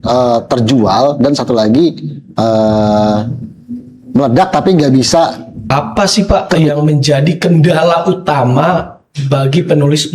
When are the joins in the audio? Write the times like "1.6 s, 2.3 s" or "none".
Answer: 5.7 s